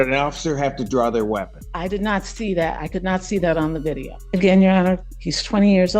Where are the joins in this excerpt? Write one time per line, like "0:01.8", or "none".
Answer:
0:01.6
0:04.1